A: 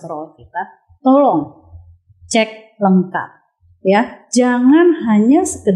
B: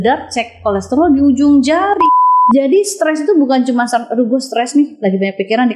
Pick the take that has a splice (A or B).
B